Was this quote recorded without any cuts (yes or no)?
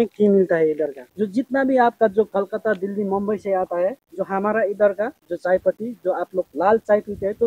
no